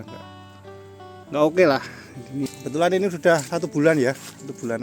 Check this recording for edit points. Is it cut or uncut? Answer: cut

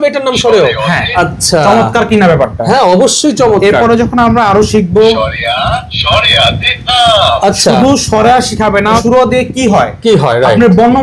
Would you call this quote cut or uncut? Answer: cut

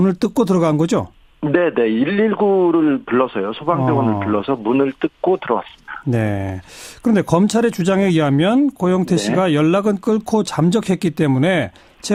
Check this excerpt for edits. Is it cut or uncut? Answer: uncut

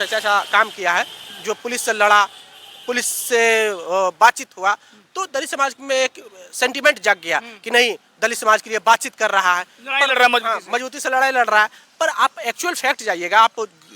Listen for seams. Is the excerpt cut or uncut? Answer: uncut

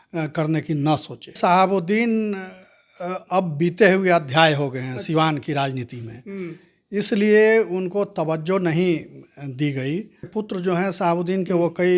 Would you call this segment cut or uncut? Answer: cut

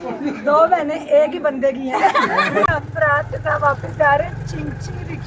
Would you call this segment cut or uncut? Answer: cut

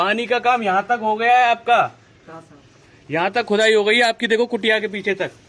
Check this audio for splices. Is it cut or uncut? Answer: uncut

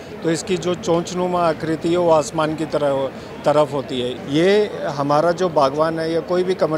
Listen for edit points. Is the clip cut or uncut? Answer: cut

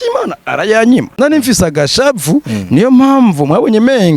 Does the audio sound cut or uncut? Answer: cut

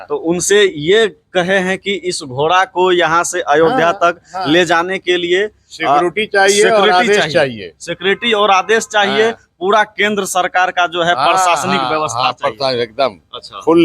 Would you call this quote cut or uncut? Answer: uncut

